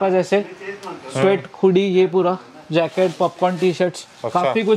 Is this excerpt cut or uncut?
uncut